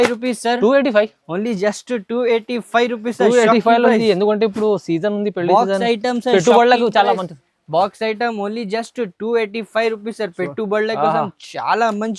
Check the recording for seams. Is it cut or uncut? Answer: uncut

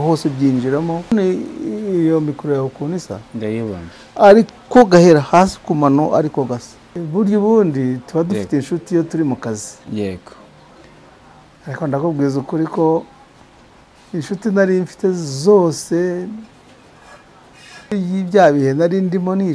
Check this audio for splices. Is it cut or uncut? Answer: cut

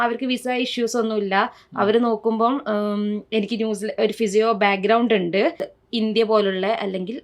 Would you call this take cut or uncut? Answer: cut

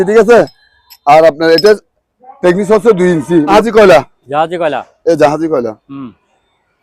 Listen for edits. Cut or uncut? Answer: cut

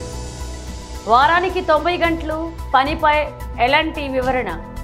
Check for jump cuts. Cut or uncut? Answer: cut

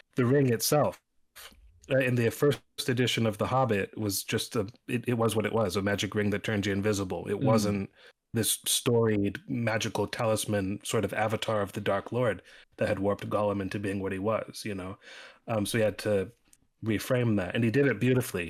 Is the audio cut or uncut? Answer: uncut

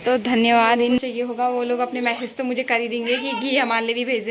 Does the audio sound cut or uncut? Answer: cut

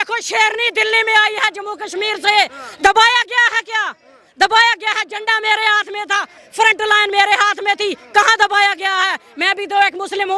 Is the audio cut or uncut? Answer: uncut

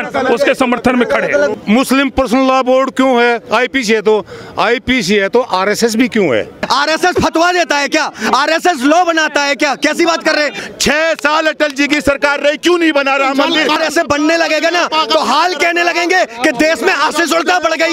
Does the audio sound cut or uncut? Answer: cut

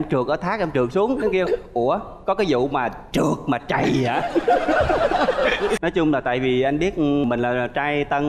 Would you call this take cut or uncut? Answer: cut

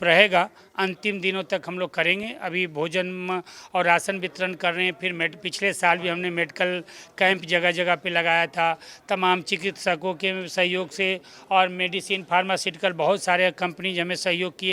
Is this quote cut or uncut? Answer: uncut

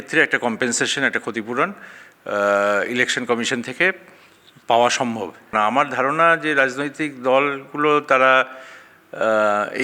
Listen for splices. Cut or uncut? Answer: cut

